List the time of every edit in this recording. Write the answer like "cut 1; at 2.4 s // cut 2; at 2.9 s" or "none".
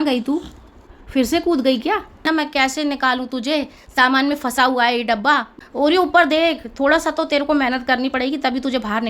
cut 1; at 2.2 s // cut 2; at 5.6 s